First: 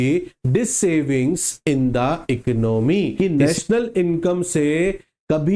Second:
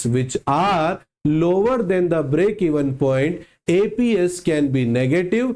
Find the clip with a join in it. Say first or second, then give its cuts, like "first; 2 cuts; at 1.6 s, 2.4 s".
first; 1 cut; at 3.1 s